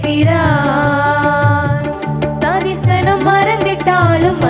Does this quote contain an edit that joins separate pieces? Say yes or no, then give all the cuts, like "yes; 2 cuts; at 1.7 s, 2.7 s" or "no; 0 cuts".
no; 0 cuts